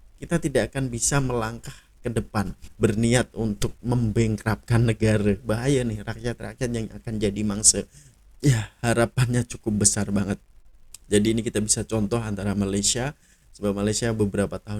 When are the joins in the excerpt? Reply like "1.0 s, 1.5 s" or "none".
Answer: 2.6 s, 5.4 s, 8.1 s